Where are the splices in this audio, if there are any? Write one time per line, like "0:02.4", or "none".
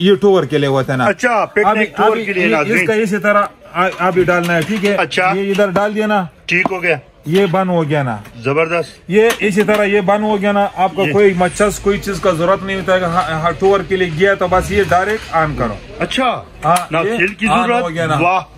none